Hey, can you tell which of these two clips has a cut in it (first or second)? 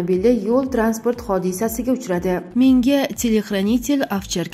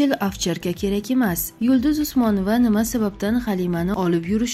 first